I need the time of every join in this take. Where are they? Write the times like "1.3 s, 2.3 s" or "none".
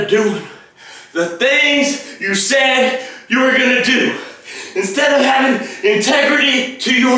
none